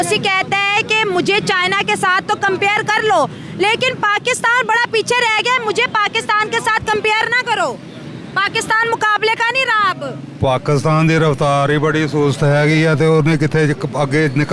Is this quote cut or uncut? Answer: uncut